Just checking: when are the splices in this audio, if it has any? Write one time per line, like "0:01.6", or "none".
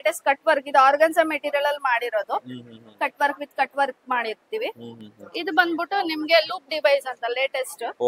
none